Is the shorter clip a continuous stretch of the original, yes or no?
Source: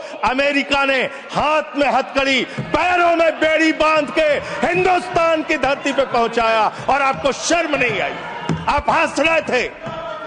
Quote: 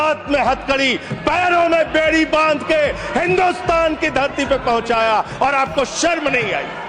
yes